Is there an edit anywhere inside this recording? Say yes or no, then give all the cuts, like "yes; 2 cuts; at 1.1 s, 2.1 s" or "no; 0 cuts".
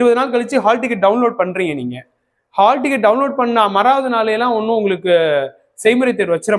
no; 0 cuts